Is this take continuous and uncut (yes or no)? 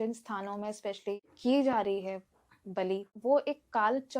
no